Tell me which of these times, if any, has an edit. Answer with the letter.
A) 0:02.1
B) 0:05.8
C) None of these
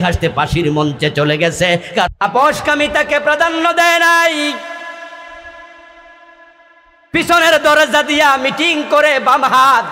A